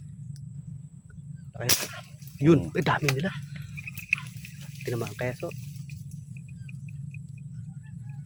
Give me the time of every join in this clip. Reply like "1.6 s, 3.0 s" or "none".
none